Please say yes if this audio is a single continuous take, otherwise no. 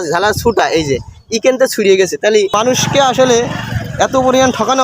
no